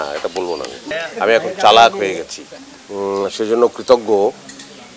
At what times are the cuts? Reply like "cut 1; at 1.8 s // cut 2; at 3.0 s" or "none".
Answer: cut 1; at 0.9 s // cut 2; at 2.5 s